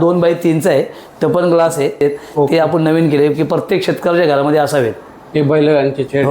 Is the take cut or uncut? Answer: cut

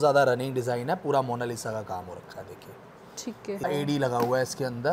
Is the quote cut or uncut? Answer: cut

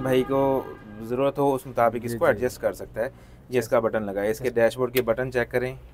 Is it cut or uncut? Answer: uncut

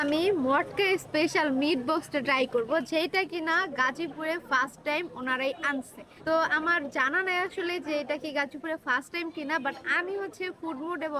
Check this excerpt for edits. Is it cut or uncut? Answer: uncut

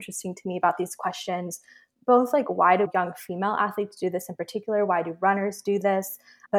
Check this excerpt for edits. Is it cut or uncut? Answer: cut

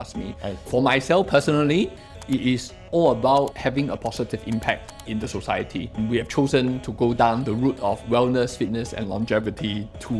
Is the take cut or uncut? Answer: cut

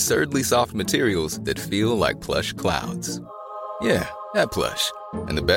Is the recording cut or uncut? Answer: uncut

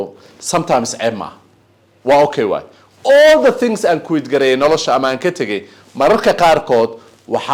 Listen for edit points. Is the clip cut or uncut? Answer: uncut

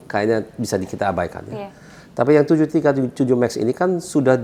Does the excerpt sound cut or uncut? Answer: uncut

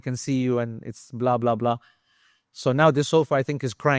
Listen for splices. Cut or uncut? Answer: uncut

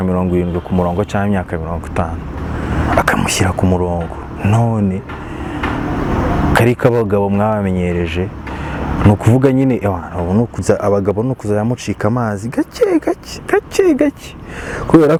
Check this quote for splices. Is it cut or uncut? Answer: uncut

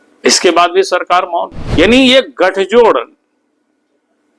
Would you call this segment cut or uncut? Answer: cut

